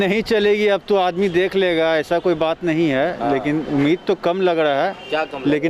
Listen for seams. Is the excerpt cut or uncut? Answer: uncut